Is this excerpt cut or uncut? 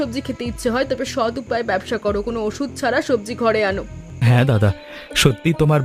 cut